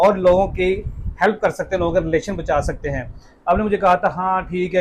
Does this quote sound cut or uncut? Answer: uncut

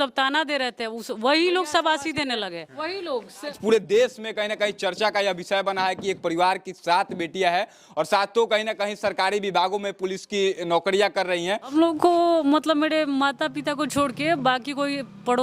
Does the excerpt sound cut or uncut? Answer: cut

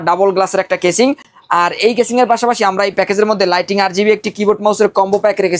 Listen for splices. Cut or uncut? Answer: uncut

